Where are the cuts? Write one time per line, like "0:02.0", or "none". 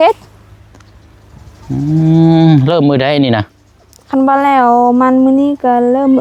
none

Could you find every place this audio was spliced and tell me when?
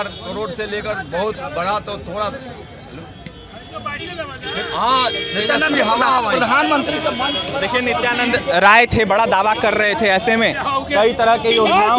none

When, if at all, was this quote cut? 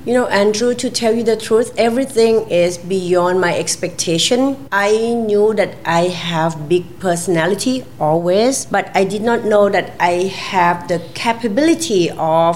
0:04.6
0:08.6

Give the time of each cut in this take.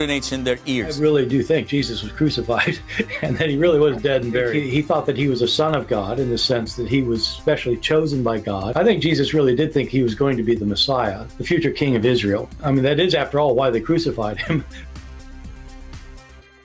none

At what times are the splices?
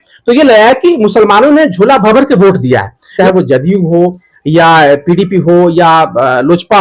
0:03.2

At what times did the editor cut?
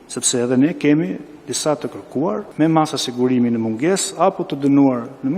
0:02.5

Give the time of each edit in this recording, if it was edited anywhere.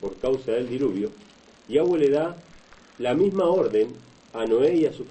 0:03.3

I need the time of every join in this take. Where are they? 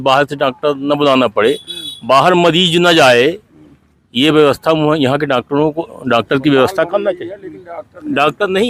none

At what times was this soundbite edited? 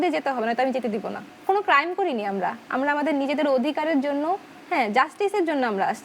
none

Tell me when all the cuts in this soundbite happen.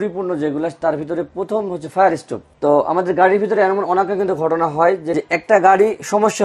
0:05.1

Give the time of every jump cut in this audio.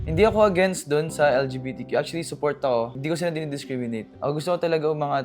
0:04.1

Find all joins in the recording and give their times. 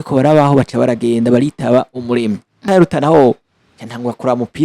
0:02.7

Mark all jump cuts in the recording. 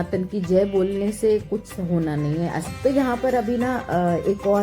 0:02.6

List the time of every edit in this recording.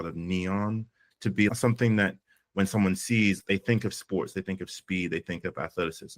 0:01.5

